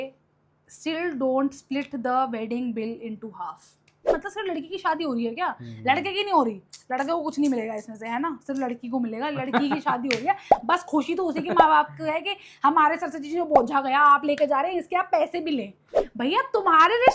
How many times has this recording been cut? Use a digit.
2